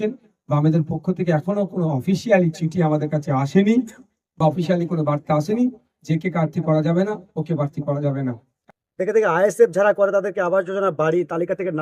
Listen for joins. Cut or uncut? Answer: cut